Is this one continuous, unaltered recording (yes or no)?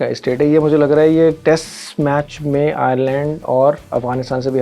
yes